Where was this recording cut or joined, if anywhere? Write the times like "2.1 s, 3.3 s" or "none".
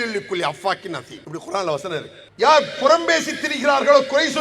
1.1 s, 2.2 s